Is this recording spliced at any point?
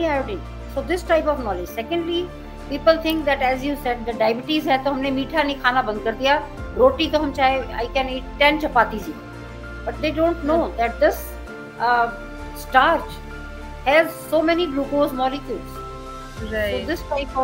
no; 0 cuts

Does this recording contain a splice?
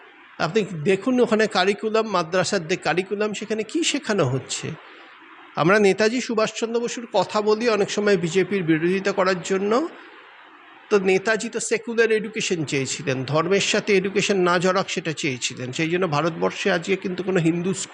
no; 0 cuts

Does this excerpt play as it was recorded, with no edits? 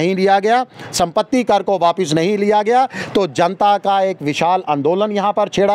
yes; 0 cuts

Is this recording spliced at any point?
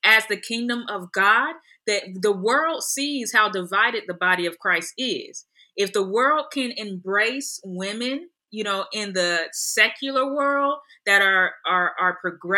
no; 0 cuts

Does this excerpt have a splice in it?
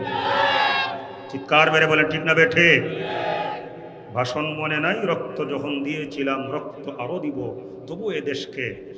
no; 0 cuts

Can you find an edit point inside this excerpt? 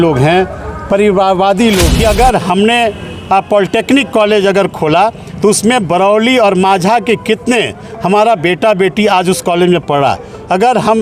yes; 1 cut; at 1.9 s

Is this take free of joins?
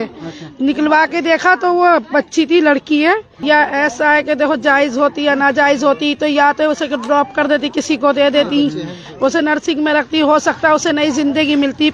no; 1 cut; at 3.3 s

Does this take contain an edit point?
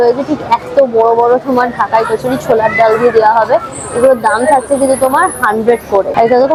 no; 0 cuts

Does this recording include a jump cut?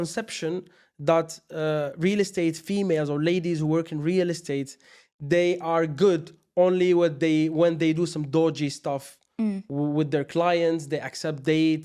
no; 0 cuts

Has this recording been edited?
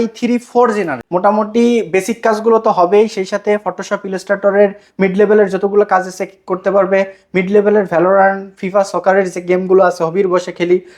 yes; 1 cut; at 1.0 s

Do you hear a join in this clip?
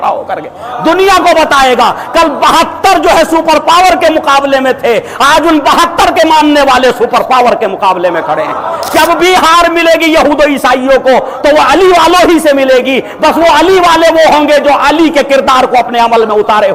yes; 1 cut; at 8.9 s

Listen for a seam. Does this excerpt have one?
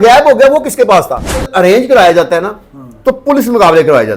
yes; 1 cut; at 1.5 s

